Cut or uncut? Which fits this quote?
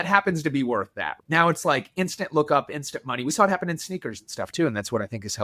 cut